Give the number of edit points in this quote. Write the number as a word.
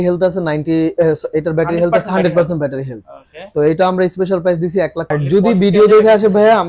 one